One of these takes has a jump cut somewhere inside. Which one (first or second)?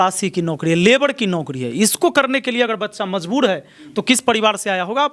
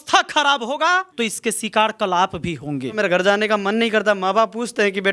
second